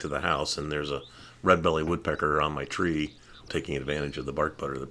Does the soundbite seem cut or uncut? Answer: cut